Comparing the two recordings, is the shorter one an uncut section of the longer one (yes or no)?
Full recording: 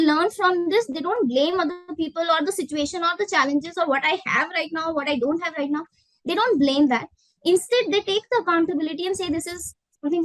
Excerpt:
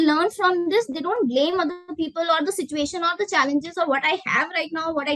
yes